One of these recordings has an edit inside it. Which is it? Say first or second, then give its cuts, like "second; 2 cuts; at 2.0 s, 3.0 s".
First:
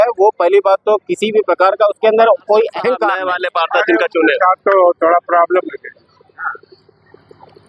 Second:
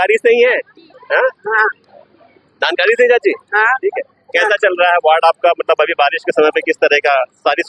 first; 1 cut; at 3.2 s